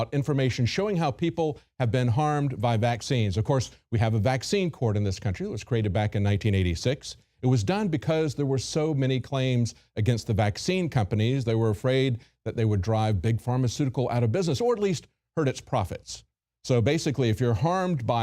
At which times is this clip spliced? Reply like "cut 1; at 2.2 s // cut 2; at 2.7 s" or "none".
cut 1; at 6.7 s